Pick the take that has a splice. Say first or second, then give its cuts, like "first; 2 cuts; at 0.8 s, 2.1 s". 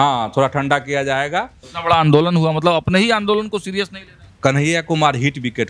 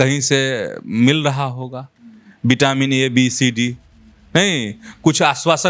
first; 2 cuts; at 1.6 s, 4.2 s